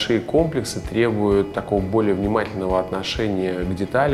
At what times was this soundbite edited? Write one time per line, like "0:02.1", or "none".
0:01.6